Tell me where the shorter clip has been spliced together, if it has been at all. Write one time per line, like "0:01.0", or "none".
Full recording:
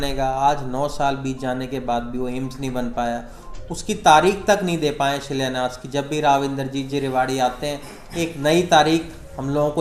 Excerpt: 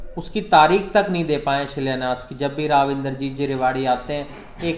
none